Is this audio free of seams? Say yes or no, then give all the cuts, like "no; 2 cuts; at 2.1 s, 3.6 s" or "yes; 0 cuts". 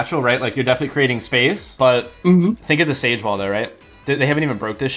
no; 1 cut; at 1.7 s